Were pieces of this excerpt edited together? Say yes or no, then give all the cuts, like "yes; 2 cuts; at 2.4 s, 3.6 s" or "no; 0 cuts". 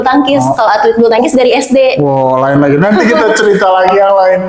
no; 0 cuts